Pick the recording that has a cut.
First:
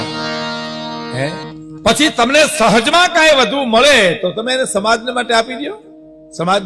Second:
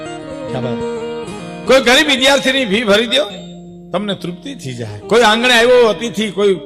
first; 1 cut; at 1.5 s

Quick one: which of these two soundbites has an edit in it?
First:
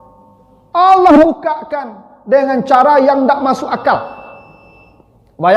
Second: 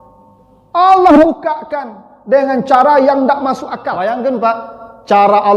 second; 1 cut; at 3.7 s

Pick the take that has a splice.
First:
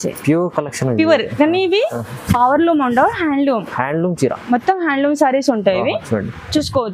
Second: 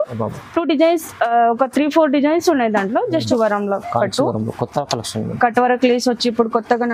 second; 1 cut; at 3.1 s

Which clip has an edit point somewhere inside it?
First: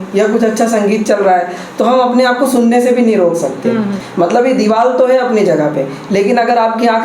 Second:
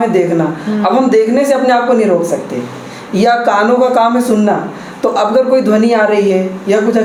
first; 1 cut; at 4.0 s

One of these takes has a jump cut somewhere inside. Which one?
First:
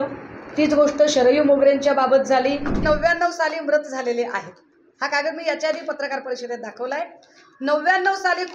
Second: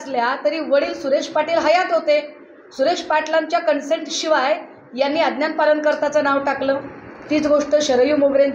first; 1 cut; at 2.8 s

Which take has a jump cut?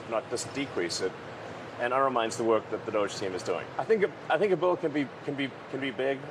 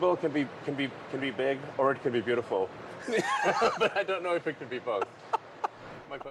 first; 1 cut; at 3.7 s

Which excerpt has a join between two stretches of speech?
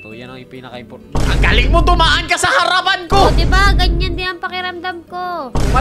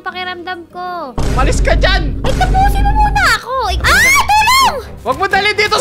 second; 1 cut; at 3.8 s

